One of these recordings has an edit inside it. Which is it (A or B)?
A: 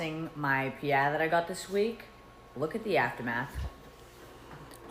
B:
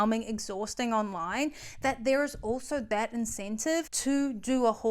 B